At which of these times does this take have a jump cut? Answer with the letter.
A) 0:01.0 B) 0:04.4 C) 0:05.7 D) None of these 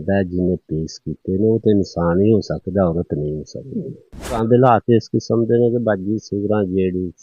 B